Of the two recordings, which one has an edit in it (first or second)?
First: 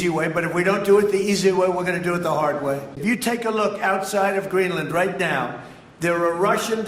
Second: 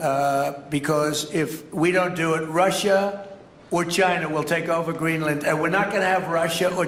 first